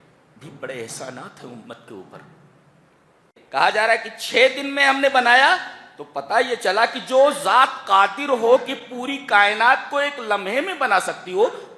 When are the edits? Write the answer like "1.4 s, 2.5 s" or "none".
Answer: 3.3 s